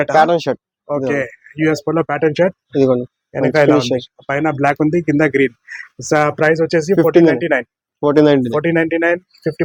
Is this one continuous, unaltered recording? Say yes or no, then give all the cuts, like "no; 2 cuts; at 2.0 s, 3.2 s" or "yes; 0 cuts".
yes; 0 cuts